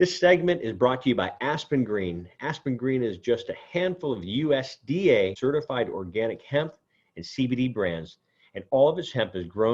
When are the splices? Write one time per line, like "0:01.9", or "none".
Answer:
0:05.3